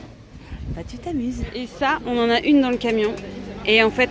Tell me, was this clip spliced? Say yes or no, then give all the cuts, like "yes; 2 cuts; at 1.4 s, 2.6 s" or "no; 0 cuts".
no; 0 cuts